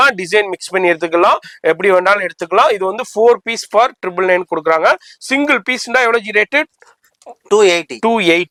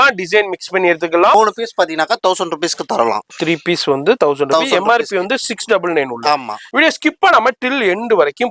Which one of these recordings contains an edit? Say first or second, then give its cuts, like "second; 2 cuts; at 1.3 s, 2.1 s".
second; 2 cuts; at 1.3 s, 6.6 s